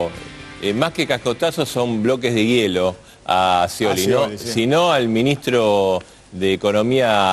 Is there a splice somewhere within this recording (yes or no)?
no